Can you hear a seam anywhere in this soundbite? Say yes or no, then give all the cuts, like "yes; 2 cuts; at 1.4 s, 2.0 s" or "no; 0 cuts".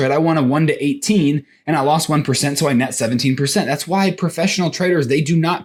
no; 0 cuts